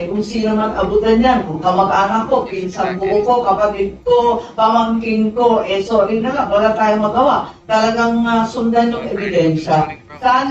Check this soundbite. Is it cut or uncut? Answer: uncut